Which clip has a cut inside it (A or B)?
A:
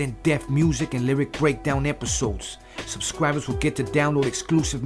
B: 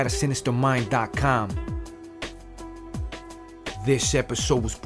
B